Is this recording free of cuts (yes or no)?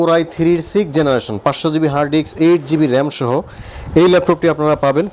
yes